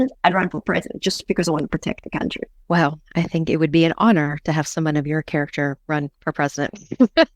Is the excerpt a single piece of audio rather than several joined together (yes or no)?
no